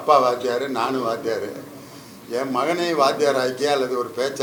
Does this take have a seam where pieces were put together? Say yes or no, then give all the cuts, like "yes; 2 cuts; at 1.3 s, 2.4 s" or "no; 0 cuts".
no; 0 cuts